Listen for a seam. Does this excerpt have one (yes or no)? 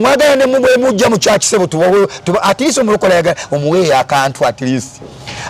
no